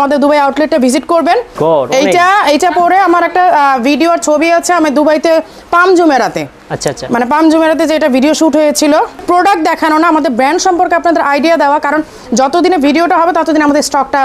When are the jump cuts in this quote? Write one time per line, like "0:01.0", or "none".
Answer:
0:01.5
0:09.2